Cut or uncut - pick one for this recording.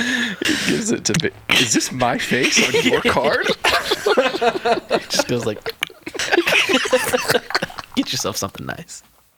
uncut